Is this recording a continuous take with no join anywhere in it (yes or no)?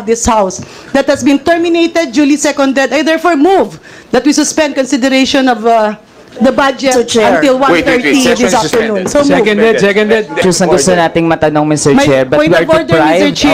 no